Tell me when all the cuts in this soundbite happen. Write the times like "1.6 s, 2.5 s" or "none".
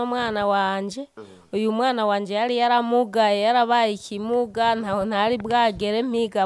none